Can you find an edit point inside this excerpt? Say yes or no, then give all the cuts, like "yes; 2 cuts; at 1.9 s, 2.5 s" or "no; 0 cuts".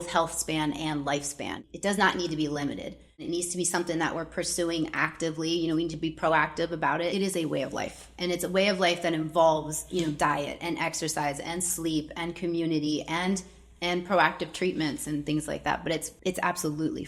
yes; 4 cuts; at 1.6 s, 3.2 s, 7.1 s, 16.1 s